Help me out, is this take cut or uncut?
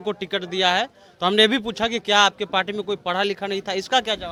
uncut